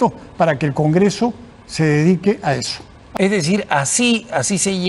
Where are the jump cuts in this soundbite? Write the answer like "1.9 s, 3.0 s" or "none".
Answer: 3.0 s